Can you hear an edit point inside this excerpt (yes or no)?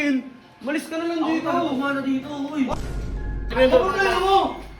yes